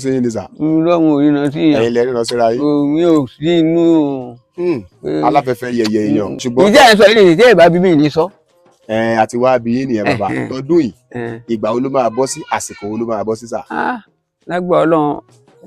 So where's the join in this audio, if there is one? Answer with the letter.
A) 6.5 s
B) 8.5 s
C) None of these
A